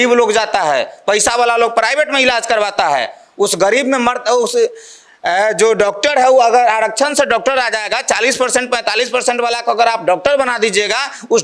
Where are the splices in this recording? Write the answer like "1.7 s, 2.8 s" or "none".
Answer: none